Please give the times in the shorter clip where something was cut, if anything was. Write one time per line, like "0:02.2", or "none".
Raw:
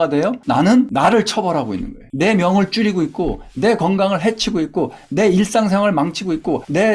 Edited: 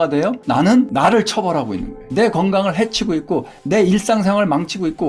0:02.0